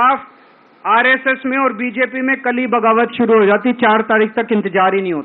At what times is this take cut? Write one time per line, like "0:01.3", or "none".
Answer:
none